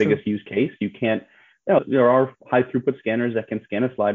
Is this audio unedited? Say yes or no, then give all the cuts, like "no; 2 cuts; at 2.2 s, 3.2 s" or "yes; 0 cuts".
no; 1 cut; at 1.8 s